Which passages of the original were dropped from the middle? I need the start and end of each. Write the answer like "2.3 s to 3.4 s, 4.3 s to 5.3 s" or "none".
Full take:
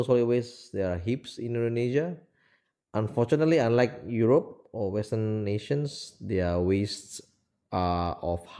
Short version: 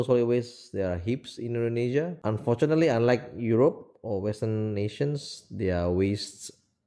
2.2 s to 2.9 s